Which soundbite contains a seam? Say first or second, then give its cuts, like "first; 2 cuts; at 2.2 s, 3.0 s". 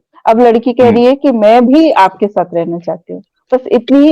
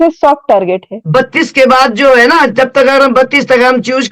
second; 1 cut; at 0.9 s